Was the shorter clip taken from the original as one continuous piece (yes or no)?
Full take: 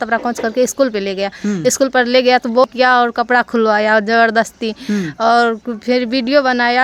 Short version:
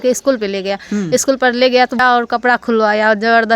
no